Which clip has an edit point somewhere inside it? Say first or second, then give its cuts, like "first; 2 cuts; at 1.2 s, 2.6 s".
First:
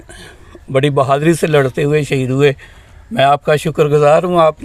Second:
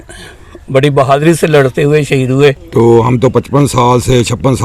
second; 1 cut; at 2.6 s